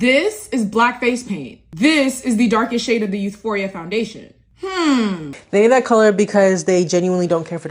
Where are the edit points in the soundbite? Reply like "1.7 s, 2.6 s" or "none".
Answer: 5.3 s